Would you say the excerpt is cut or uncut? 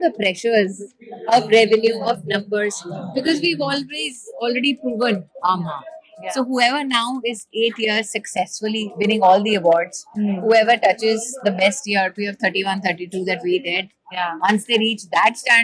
uncut